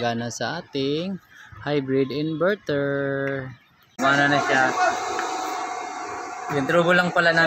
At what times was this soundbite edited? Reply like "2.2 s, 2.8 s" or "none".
3.9 s